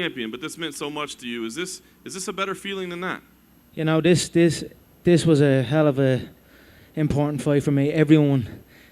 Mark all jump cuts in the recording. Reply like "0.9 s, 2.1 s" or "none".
5.2 s